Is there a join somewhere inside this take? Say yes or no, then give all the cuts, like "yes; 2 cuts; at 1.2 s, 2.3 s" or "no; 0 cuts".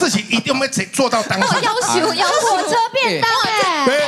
no; 0 cuts